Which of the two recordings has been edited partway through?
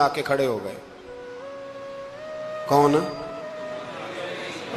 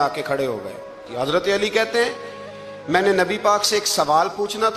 second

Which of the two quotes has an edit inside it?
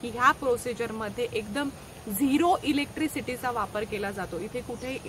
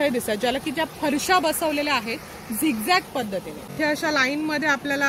second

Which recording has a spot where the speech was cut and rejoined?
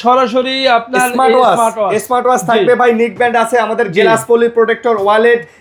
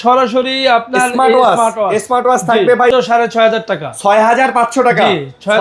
second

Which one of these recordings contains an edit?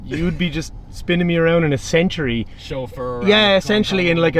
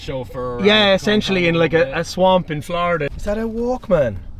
second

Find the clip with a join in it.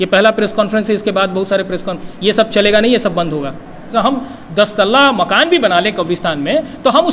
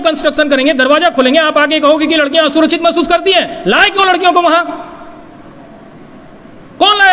first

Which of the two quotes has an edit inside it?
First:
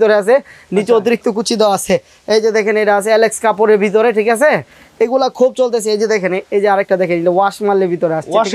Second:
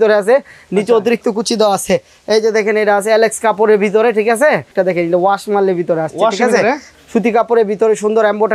second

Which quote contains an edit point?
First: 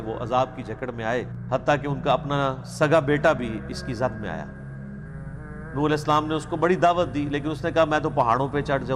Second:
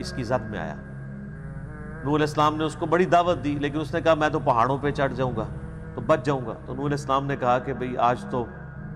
first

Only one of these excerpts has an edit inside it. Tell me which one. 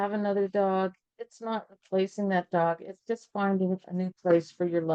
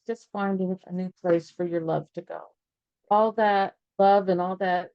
second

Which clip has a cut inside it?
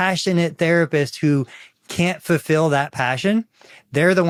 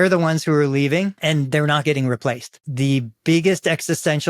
second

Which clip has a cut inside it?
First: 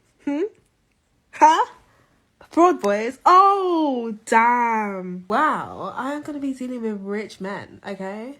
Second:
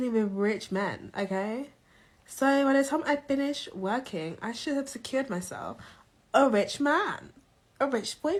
first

